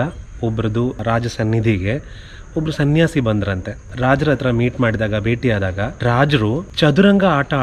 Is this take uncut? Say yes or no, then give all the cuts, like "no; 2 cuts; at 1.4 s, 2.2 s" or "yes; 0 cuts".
no; 4 cuts; at 1.0 s, 3.9 s, 5.9 s, 6.7 s